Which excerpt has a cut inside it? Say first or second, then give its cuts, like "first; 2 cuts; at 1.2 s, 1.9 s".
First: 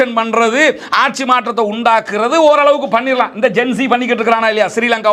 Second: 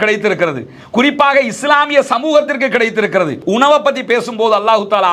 second; 1 cut; at 3.4 s